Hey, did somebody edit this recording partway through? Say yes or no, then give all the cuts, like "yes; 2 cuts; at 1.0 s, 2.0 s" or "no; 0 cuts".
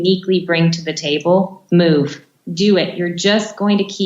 yes; 2 cuts; at 1.6 s, 2.3 s